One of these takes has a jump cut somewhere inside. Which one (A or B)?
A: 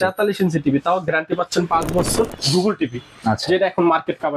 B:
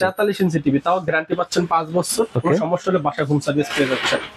A